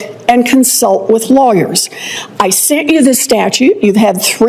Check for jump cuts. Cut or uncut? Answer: uncut